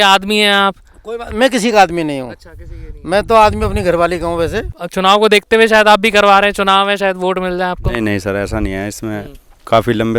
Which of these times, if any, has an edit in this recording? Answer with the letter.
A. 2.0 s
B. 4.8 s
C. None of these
B